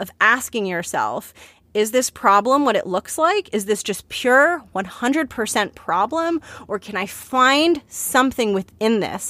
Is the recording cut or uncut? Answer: uncut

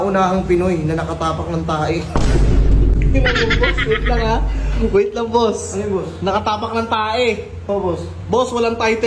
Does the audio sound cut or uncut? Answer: uncut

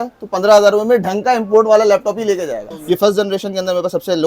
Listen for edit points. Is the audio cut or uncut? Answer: cut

